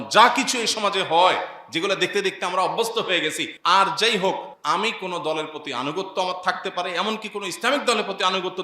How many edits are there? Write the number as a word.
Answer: two